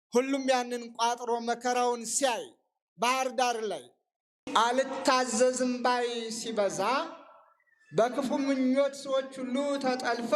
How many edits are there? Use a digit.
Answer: 1